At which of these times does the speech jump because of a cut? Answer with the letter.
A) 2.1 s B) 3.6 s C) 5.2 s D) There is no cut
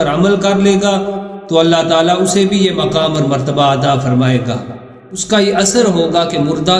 C